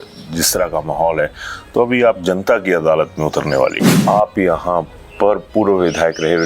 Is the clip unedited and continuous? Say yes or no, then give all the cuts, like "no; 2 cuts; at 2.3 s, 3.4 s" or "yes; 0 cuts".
no; 1 cut; at 3.9 s